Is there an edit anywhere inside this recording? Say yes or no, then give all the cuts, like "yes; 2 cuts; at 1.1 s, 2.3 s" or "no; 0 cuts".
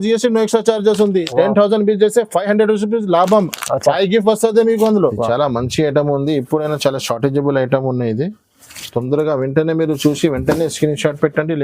yes; 1 cut; at 5.1 s